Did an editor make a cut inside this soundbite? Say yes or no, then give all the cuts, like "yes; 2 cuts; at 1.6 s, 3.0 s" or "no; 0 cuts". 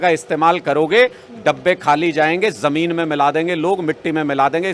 no; 0 cuts